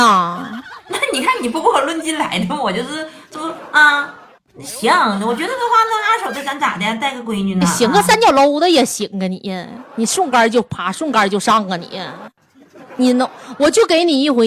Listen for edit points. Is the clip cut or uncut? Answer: uncut